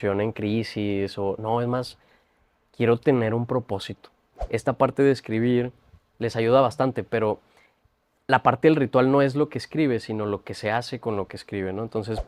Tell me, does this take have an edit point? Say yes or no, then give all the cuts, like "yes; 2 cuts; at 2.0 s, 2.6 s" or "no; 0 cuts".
yes; 1 cut; at 4.3 s